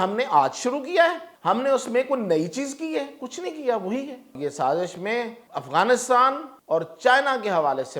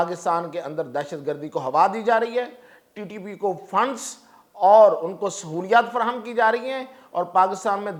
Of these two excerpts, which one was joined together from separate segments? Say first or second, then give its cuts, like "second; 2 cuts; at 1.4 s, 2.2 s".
first; 4 cuts; at 1.3 s, 4.4 s, 5.4 s, 6.5 s